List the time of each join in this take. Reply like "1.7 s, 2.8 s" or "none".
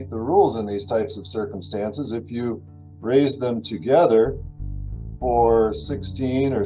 none